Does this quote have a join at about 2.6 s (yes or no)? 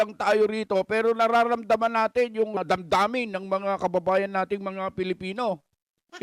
yes